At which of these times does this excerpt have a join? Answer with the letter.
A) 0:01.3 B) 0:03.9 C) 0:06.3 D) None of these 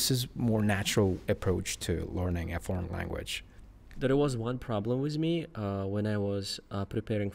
B